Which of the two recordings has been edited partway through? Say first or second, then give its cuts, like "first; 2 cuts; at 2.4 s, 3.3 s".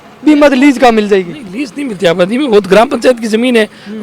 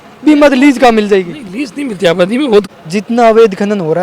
second; 1 cut; at 2.7 s